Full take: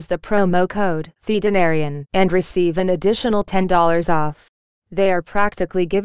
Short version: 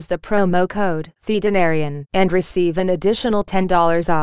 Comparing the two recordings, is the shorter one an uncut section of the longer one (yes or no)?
yes